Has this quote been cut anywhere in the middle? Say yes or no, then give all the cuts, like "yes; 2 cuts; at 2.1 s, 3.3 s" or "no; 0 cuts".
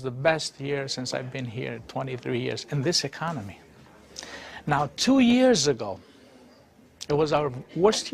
yes; 1 cut; at 2.9 s